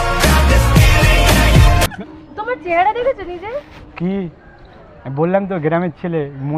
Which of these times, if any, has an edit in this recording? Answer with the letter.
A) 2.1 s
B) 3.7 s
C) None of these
A